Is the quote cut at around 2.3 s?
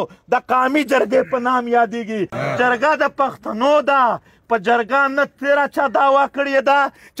yes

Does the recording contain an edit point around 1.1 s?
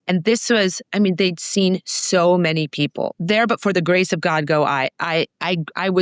no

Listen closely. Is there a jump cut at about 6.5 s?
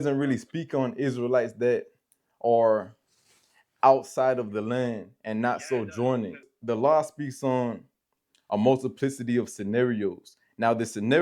yes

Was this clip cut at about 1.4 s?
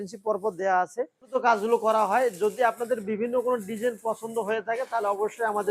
yes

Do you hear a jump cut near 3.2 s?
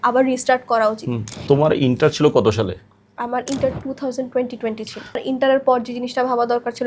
no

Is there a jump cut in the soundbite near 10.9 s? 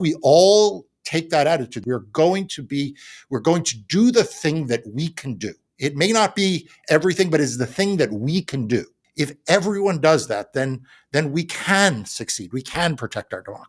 no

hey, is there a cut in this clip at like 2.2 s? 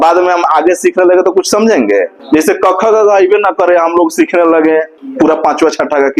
yes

